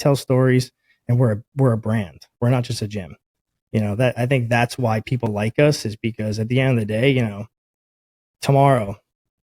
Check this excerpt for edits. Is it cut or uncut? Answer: uncut